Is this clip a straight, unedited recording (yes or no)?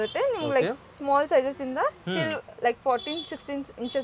yes